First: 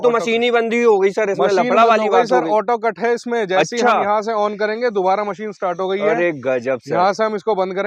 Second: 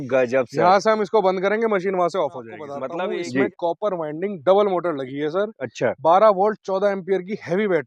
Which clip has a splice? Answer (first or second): second